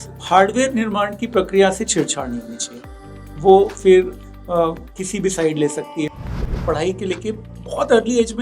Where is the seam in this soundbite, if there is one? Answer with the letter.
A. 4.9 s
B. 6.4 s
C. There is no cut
B